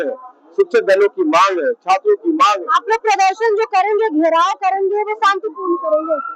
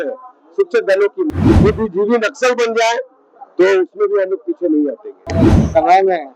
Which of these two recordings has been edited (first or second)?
second